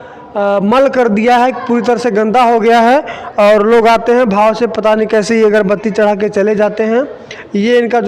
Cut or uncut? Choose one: uncut